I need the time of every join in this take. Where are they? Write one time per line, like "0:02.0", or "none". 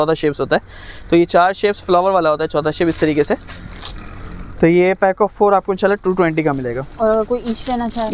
none